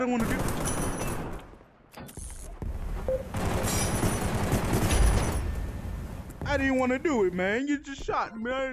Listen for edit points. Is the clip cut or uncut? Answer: uncut